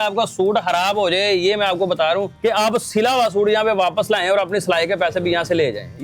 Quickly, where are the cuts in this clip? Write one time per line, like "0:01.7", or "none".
0:02.3